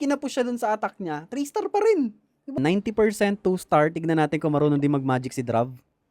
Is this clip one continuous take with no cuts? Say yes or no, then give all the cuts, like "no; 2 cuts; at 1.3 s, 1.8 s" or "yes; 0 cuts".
no; 1 cut; at 2.6 s